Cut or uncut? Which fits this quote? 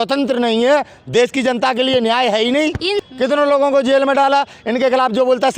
cut